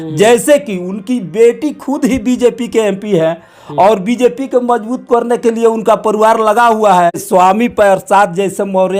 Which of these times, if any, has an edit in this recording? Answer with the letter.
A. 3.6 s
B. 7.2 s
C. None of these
B